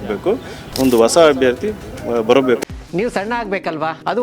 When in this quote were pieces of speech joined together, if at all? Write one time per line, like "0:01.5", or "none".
0:02.6